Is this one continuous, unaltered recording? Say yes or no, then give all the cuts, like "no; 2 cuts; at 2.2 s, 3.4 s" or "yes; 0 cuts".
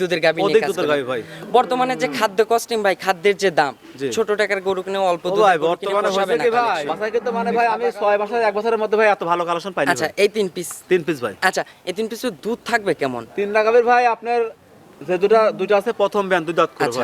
no; 1 cut; at 6.9 s